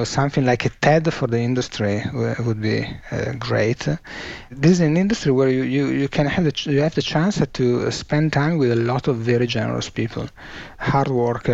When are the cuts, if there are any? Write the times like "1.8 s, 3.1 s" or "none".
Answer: 4.5 s